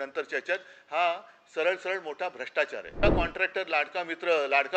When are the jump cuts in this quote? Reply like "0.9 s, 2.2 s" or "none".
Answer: 3.0 s